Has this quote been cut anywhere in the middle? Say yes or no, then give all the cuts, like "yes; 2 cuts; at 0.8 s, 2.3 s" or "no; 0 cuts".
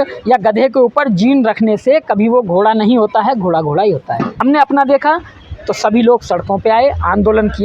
yes; 1 cut; at 4.3 s